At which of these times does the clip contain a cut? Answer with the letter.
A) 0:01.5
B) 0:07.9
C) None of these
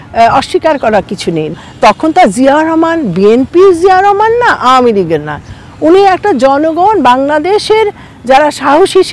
A